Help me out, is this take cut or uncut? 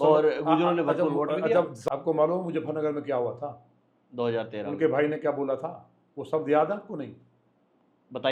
cut